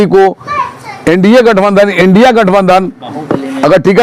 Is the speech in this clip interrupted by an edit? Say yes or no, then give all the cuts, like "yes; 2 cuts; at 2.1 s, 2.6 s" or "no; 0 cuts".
no; 0 cuts